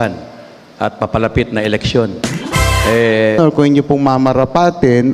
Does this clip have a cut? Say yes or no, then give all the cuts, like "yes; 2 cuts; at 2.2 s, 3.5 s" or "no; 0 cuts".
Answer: yes; 1 cut; at 3.4 s